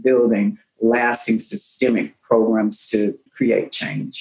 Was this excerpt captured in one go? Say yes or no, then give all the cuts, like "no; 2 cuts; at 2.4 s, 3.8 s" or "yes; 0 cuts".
no; 1 cut; at 3.3 s